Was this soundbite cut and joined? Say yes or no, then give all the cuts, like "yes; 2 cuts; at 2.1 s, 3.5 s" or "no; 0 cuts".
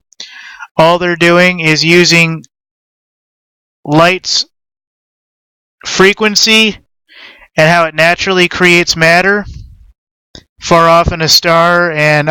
yes; 1 cut; at 7.1 s